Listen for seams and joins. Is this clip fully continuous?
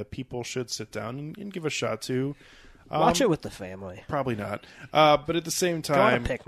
yes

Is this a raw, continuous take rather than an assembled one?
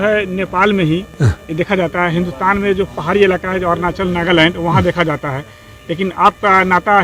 yes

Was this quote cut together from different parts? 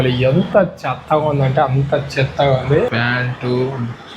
yes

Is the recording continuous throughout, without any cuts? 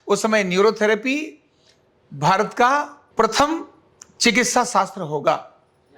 no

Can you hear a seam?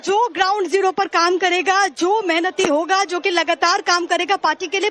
yes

